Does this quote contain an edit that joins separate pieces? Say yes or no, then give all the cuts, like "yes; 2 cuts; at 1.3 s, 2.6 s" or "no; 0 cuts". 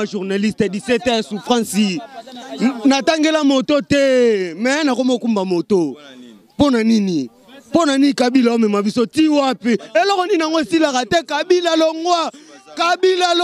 no; 0 cuts